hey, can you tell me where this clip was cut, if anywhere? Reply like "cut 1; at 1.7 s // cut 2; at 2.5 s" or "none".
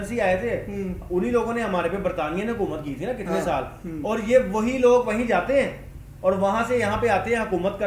none